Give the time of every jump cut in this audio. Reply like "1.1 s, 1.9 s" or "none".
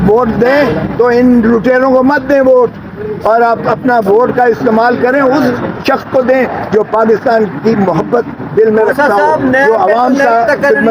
none

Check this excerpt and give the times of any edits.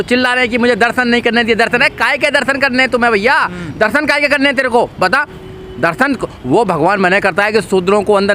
none

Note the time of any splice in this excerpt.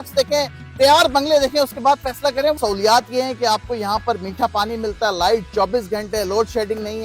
2.6 s

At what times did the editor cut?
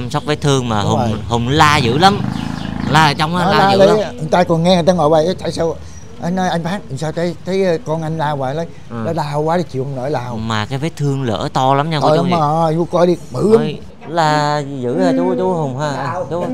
13.9 s

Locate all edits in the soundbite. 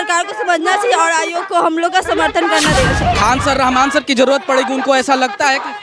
3.0 s

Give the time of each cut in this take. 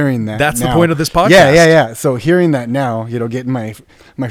none

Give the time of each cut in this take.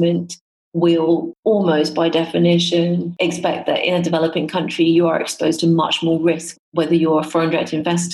1.3 s, 3.1 s, 6.6 s

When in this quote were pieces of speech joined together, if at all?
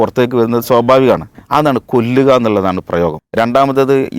1.3 s, 3.2 s

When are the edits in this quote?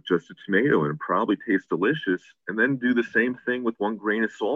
none

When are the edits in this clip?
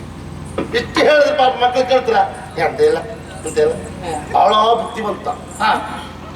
4.2 s

